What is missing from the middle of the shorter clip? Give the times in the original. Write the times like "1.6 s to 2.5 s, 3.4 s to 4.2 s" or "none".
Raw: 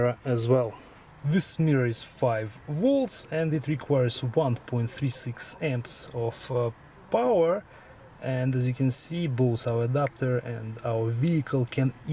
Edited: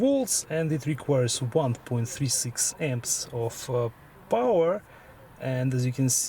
none